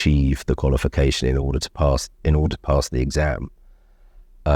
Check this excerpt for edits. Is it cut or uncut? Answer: uncut